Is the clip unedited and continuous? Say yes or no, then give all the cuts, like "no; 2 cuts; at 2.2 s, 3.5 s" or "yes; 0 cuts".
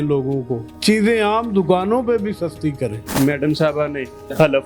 no; 1 cut; at 3.0 s